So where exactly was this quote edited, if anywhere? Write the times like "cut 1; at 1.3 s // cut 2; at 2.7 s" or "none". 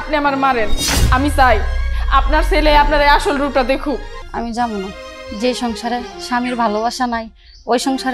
cut 1; at 4.2 s